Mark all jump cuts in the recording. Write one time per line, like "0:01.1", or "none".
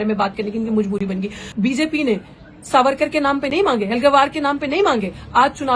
0:01.4